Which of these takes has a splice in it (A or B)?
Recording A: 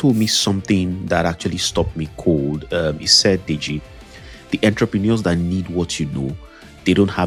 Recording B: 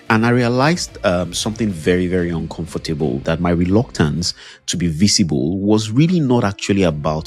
B